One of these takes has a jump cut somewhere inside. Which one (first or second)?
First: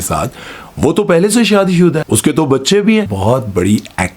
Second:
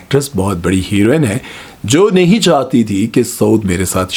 first